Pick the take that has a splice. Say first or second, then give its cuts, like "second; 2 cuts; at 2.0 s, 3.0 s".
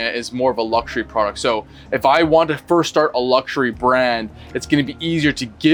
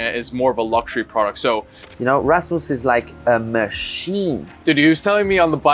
second; 2 cuts; at 1.7 s, 4.5 s